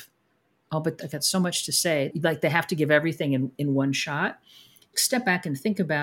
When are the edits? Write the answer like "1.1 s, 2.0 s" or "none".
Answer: 1.0 s, 2.1 s, 4.9 s